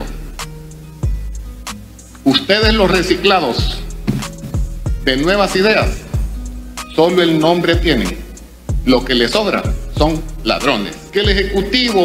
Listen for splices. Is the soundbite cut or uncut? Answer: cut